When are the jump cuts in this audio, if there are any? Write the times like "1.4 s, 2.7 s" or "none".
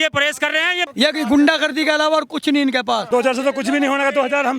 0.9 s, 3.0 s

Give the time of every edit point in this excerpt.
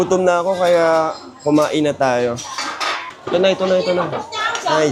none

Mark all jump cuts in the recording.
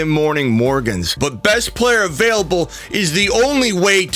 1.1 s

